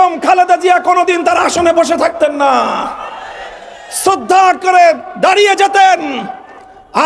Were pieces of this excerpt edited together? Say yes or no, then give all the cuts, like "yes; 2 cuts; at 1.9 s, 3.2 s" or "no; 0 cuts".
no; 0 cuts